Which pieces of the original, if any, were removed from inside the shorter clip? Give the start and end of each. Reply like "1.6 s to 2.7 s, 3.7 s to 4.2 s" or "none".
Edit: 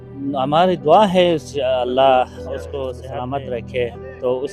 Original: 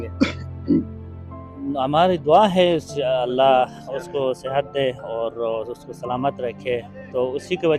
4.4 s to 5.9 s